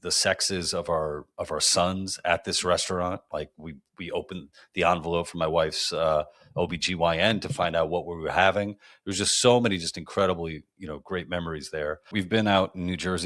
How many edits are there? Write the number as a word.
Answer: one